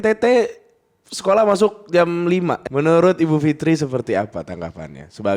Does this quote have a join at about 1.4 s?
no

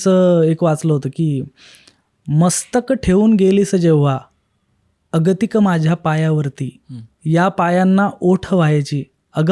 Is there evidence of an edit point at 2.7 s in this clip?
no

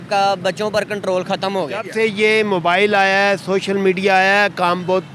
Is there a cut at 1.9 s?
yes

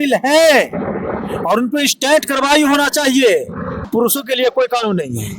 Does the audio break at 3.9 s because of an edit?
yes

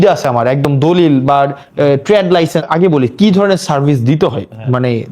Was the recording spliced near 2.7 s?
yes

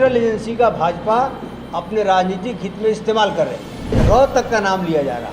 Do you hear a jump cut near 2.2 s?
no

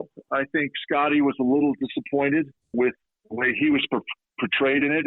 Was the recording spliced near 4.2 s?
no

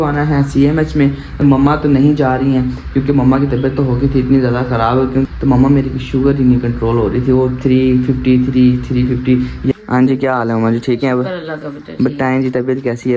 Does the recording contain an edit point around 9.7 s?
yes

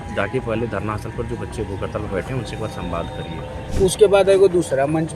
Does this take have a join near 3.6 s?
yes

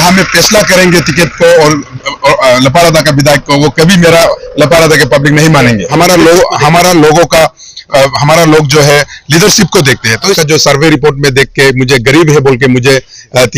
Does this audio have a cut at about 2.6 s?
no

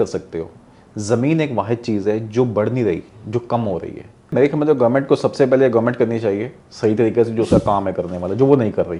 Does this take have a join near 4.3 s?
yes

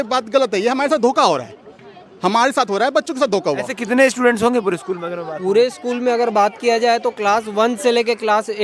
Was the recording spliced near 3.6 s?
no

